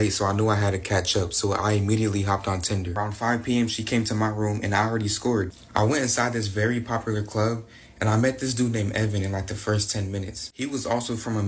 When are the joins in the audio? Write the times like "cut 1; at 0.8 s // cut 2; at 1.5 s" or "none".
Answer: cut 1; at 2.9 s // cut 2; at 5.6 s